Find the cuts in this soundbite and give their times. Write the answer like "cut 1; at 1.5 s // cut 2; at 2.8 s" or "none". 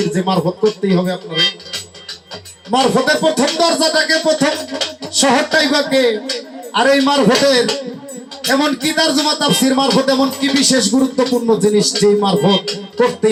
none